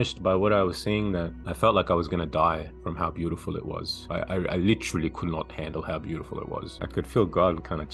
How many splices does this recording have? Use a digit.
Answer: 3